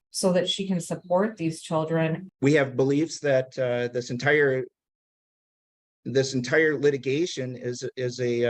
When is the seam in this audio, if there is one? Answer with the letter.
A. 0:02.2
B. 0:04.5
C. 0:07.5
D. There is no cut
A